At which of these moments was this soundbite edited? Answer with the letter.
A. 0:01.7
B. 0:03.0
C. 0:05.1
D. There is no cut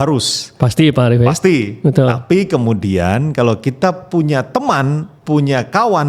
C